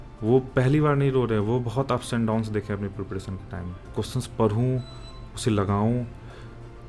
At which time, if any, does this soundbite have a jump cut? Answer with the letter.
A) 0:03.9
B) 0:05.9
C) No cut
A